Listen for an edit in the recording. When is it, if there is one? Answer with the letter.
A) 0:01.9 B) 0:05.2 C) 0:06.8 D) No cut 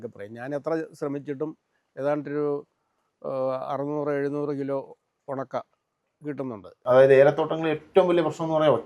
C